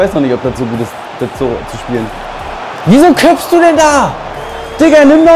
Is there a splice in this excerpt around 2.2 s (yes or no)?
yes